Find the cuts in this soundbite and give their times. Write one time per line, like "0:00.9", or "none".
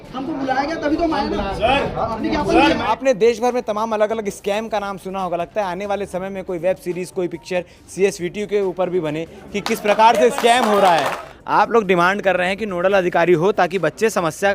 0:02.9
0:11.2